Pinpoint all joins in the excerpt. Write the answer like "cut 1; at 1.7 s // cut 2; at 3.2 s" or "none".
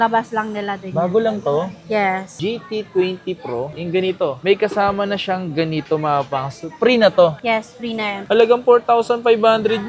cut 1; at 2.3 s // cut 2; at 8.2 s